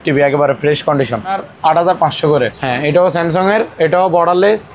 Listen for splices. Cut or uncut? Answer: cut